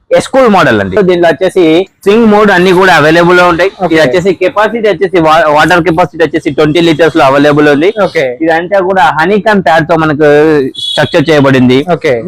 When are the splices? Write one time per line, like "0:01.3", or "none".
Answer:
0:01.0
0:01.9